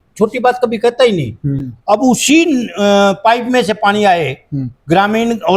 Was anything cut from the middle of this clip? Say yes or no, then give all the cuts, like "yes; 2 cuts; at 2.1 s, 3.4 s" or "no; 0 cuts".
yes; 1 cut; at 1.5 s